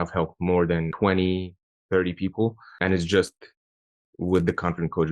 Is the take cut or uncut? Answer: cut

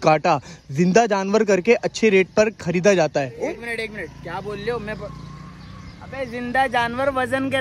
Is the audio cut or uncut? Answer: uncut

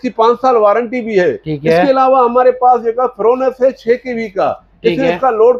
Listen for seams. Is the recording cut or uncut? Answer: uncut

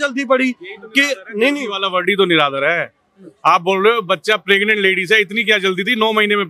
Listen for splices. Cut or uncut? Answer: uncut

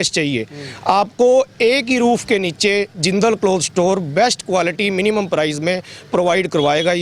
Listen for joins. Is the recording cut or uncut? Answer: uncut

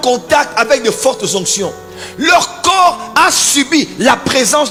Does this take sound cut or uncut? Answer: uncut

